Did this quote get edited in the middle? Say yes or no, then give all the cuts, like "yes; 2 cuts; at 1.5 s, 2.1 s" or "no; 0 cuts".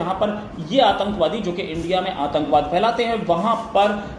no; 0 cuts